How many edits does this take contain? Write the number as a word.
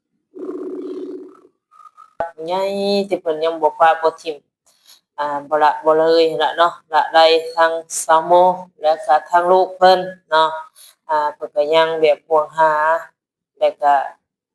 one